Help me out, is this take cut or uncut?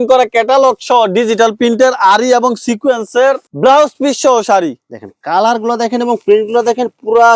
uncut